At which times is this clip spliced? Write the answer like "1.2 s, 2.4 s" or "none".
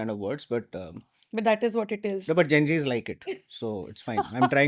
none